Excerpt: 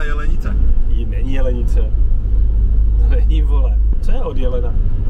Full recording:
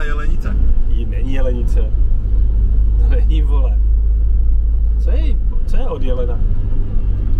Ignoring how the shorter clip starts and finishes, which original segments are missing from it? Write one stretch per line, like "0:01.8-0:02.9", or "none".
0:03.9-0:05.6

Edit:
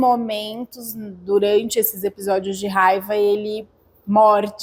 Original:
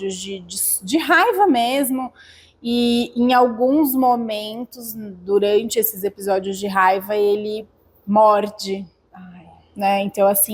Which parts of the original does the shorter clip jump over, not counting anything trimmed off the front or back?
none

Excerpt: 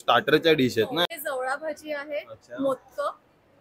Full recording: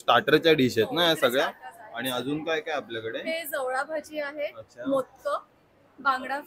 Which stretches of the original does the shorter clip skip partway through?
0:01.1-0:03.3

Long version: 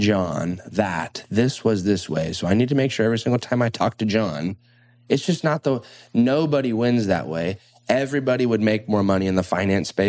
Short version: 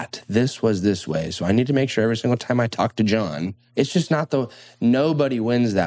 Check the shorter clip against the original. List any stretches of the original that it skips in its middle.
0:04.6-0:04.9

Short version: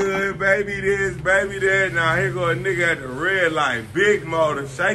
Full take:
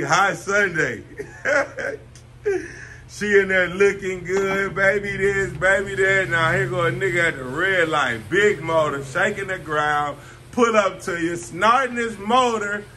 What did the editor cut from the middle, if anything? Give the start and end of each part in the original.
none

